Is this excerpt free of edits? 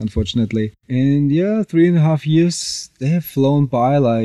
yes; 0 cuts

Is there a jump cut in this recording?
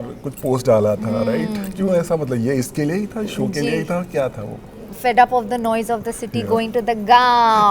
no; 0 cuts

